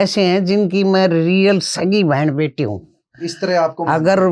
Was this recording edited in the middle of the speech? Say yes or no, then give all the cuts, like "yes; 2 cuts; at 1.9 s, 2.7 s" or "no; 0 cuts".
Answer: no; 0 cuts